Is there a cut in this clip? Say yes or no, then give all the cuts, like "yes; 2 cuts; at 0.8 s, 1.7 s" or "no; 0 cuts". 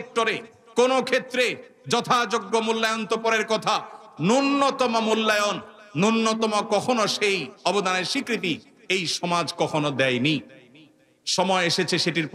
no; 0 cuts